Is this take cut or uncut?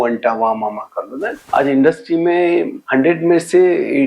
cut